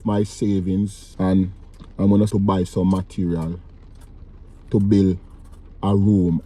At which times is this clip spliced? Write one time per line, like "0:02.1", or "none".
0:01.0
0:02.3